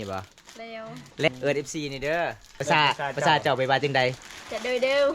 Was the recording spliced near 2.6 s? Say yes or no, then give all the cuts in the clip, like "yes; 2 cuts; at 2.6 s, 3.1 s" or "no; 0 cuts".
yes; 2 cuts; at 1.3 s, 2.6 s